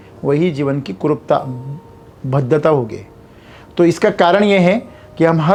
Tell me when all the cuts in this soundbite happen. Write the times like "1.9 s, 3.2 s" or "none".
none